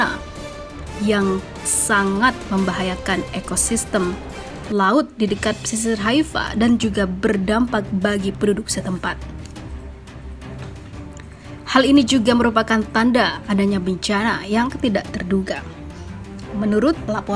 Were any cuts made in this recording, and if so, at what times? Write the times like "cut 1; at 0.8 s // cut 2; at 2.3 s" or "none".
cut 1; at 9.2 s // cut 2; at 11.7 s

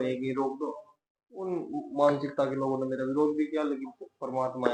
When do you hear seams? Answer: none

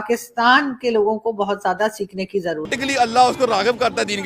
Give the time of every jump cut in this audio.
cut 1; at 2.7 s

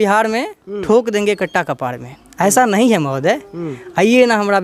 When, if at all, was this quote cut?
none

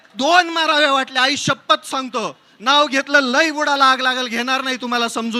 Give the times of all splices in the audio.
none

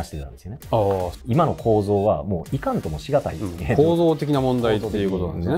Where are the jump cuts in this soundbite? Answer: cut 1; at 1.1 s

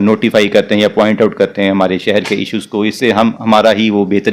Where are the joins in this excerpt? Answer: none

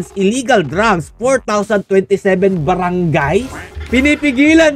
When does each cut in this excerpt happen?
cut 1; at 3.7 s

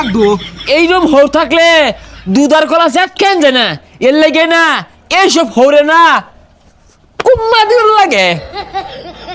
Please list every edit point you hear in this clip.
cut 1; at 8.4 s

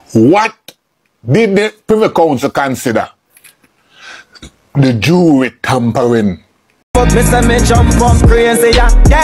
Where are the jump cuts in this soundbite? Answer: cut 1; at 6.8 s

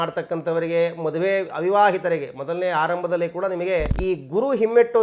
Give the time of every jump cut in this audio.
cut 1; at 3.9 s

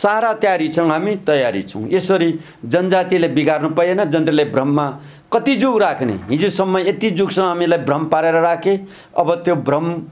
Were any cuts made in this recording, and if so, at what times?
none

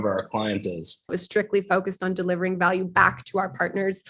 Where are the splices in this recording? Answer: cut 1; at 1.1 s

